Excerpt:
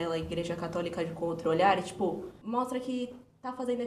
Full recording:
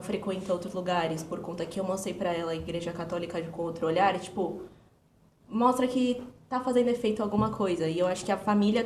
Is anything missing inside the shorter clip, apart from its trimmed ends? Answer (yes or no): yes